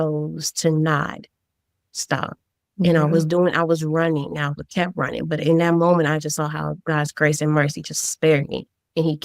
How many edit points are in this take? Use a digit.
0